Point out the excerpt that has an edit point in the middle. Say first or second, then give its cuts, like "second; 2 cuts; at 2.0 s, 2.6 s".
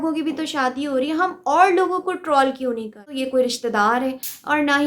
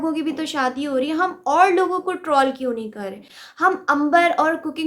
first; 1 cut; at 3.1 s